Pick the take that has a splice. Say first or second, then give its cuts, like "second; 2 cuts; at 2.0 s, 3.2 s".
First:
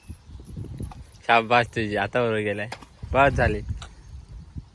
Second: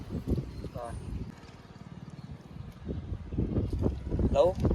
second; 1 cut; at 1.3 s